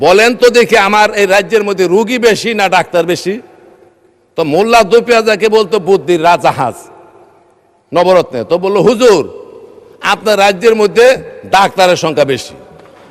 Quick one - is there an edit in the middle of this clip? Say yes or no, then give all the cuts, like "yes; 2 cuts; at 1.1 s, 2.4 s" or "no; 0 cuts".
no; 0 cuts